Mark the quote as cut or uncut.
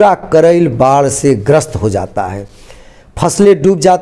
uncut